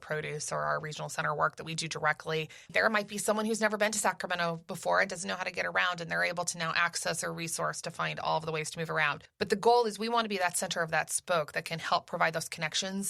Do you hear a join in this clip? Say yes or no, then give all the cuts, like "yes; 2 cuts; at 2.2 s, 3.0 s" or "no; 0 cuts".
yes; 2 cuts; at 2.7 s, 9.2 s